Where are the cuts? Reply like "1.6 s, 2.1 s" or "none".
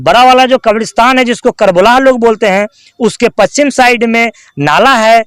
none

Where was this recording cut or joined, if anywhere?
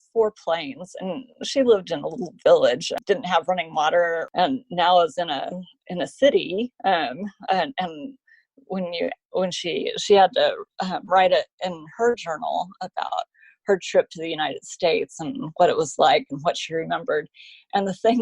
2.9 s, 4.3 s

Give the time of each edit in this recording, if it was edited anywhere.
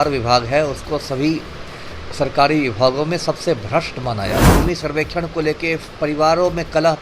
4.5 s

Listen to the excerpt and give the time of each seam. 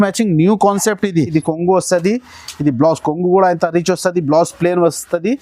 1.3 s

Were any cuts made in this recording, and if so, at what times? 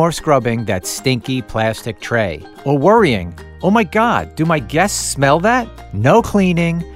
5.8 s

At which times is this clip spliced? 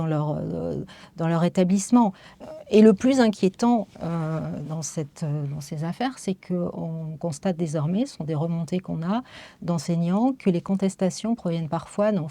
2.3 s

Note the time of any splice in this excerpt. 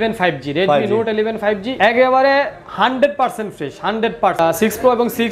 1.7 s, 4.4 s

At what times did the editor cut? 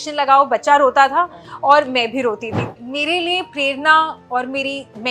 2.6 s

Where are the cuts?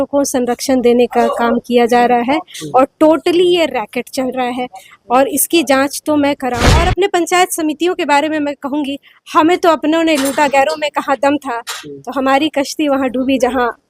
6.7 s

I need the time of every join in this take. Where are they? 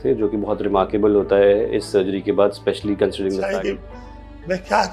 3.5 s

